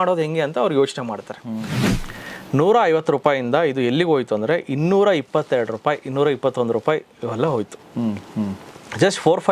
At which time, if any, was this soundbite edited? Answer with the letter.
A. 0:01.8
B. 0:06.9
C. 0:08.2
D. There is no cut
A